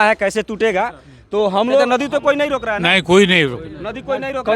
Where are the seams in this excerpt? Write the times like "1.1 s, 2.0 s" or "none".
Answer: 2.1 s